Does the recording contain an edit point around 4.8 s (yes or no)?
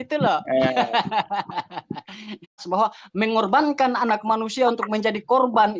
no